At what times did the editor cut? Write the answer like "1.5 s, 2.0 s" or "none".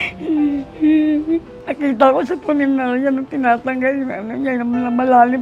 1.6 s